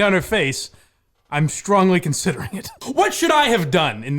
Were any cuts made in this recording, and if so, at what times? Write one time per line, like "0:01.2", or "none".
0:02.8

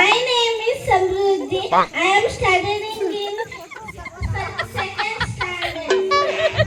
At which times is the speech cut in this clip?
none

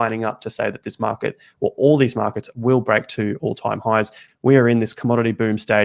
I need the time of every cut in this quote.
0:04.2

